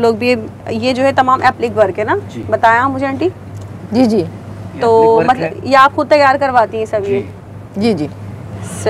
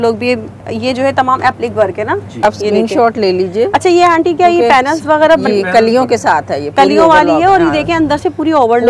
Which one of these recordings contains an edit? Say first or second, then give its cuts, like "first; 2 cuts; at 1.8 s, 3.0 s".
second; 1 cut; at 2.4 s